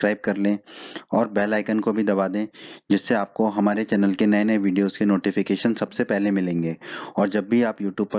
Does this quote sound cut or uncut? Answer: cut